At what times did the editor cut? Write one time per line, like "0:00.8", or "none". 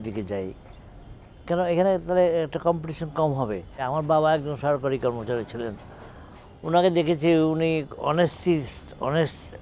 0:03.7